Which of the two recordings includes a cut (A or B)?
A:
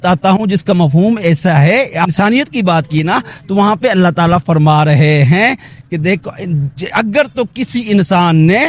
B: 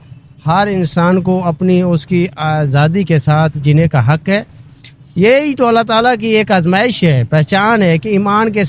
A